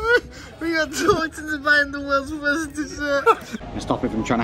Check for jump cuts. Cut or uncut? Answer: cut